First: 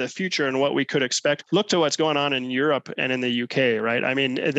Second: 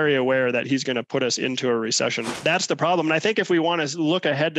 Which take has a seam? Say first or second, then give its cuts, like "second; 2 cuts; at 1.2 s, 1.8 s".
second; 1 cut; at 2.4 s